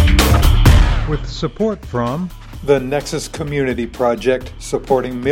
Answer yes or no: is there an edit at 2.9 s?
no